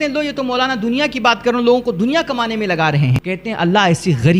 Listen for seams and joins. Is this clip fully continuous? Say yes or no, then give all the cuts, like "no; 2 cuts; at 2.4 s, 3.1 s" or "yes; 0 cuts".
no; 1 cut; at 3.2 s